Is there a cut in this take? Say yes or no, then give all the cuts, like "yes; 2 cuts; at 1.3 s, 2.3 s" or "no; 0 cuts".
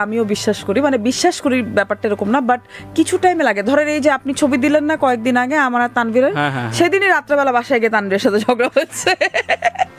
no; 0 cuts